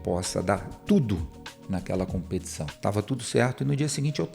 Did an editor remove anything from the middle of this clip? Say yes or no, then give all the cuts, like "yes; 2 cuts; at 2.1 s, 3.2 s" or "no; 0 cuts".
yes; 1 cut; at 2.6 s